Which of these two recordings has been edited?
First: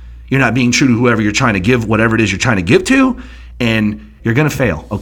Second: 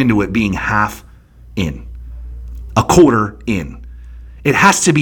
first; 1 cut; at 4.1 s

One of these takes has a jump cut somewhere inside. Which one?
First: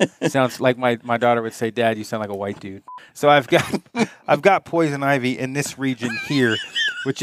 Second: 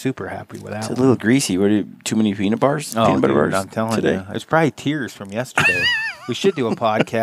first; 1 cut; at 2.8 s

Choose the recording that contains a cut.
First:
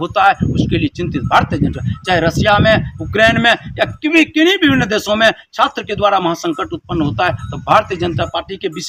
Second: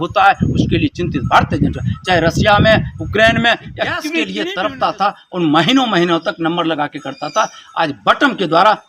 second; 1 cut; at 4.2 s

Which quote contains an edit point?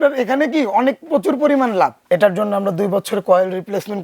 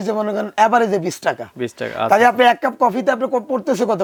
first; 1 cut; at 2.0 s

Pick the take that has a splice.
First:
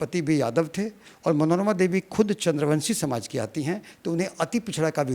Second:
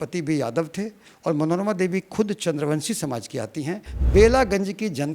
second; 1 cut; at 3.9 s

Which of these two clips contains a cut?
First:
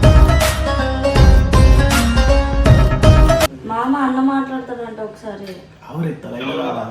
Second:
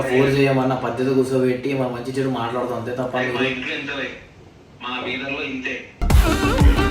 first; 1 cut; at 3.5 s

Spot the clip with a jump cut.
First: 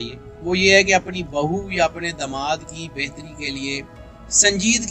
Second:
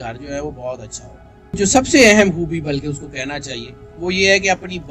second; 1 cut; at 1.6 s

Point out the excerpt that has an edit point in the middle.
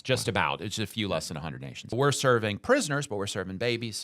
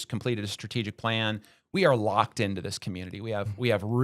first; 1 cut; at 1.9 s

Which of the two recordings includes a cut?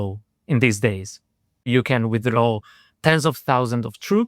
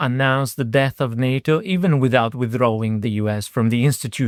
first; 1 cut; at 1.7 s

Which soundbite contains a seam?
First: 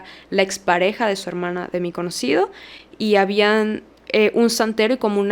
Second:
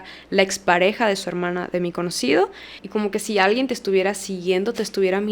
second; 1 cut; at 2.8 s

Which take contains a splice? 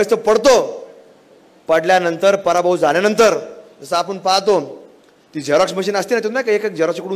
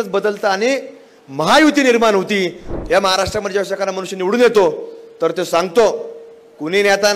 second; 1 cut; at 2.6 s

